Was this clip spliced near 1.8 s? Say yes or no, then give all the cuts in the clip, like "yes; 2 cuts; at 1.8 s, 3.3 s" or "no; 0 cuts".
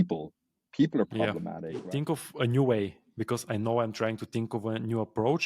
yes; 1 cut; at 1.8 s